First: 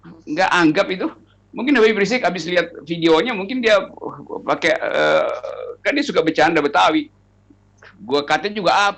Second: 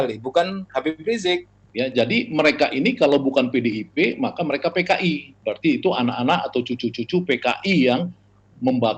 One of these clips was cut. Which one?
second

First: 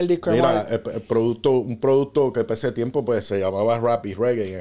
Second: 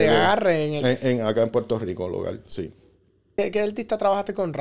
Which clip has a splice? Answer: second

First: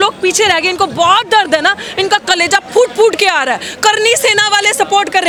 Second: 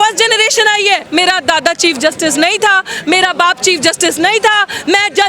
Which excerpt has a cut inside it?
second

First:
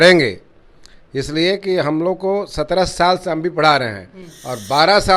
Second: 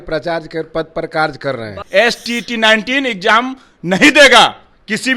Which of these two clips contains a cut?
second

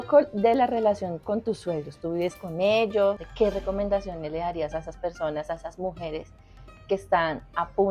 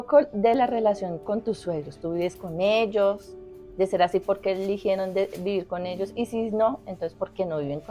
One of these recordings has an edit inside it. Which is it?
first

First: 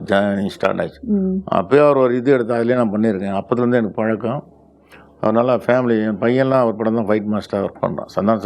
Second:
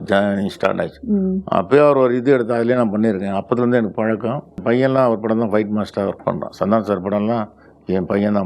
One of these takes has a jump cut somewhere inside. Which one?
second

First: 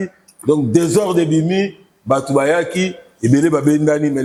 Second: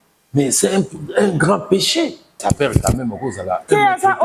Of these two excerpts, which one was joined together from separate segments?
second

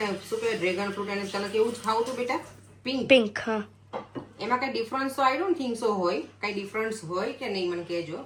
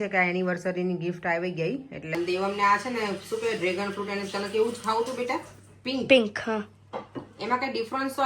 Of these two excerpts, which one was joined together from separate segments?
second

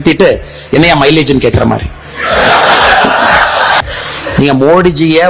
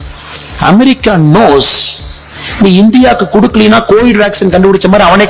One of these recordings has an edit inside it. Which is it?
first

